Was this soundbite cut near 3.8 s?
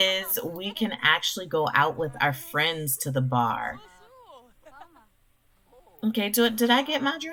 no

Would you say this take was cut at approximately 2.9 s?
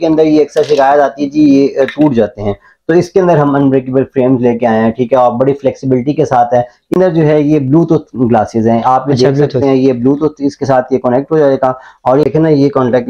no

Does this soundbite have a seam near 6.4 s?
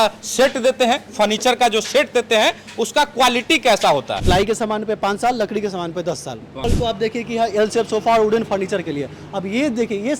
yes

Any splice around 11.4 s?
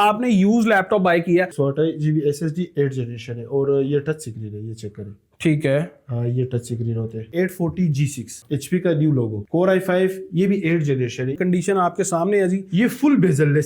yes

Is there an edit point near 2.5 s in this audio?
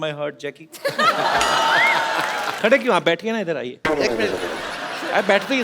yes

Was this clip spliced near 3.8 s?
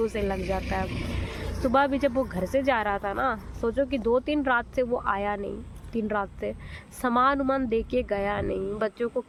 no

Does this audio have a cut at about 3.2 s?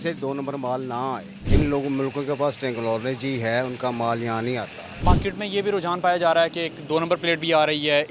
no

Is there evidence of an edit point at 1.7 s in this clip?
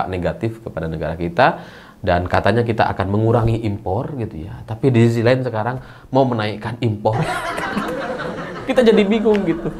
no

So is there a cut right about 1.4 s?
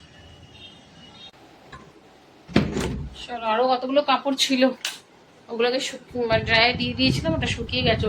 yes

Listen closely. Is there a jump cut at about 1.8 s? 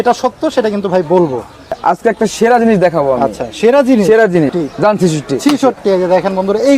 yes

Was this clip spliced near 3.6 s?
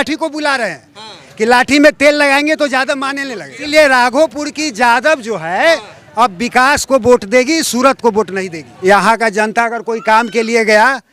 yes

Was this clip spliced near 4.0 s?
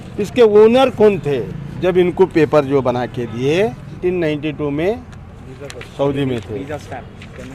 yes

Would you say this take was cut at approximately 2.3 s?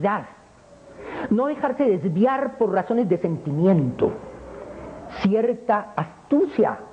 no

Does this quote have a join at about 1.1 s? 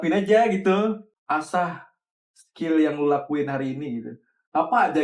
yes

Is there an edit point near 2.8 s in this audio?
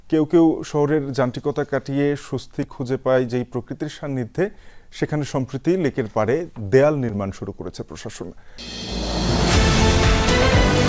no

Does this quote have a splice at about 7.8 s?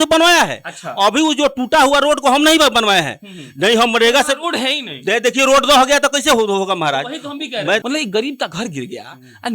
yes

